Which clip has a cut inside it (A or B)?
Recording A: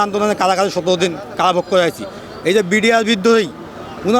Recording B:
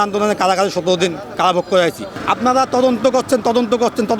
B